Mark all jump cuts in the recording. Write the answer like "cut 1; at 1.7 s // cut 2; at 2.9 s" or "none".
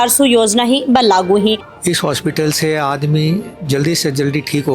cut 1; at 1.6 s